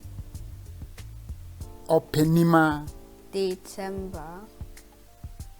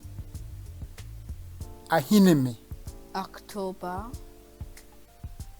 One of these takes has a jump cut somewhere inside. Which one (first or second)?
first